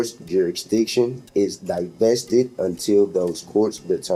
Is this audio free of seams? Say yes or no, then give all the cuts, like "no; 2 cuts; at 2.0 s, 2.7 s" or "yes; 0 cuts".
yes; 0 cuts